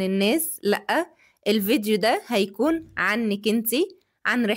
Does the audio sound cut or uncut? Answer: uncut